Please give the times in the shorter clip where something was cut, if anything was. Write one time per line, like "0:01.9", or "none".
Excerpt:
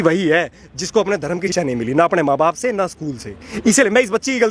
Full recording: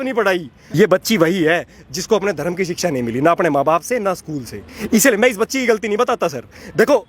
0:01.5

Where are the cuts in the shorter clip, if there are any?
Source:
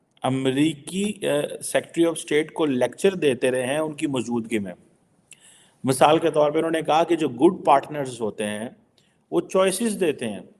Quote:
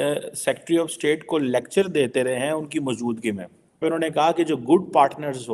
0:03.8

